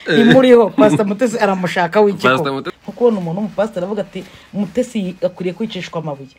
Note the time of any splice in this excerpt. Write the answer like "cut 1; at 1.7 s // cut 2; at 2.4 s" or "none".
cut 1; at 2.7 s